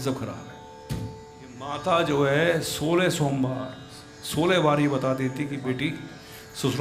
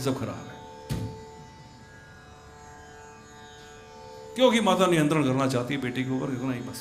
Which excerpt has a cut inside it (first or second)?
first